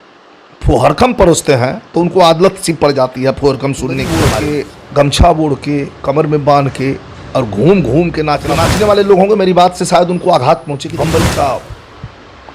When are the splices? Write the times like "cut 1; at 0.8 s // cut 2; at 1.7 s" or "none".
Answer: cut 1; at 4.2 s // cut 2; at 8.6 s // cut 3; at 10.8 s